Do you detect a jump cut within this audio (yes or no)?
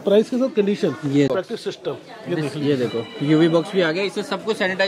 yes